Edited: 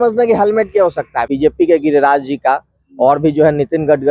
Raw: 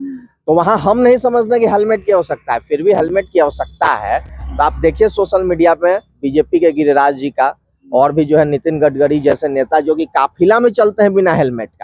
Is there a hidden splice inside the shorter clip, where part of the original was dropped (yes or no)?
yes